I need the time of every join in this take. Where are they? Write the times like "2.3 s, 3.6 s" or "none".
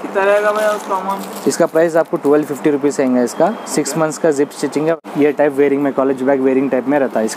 4.9 s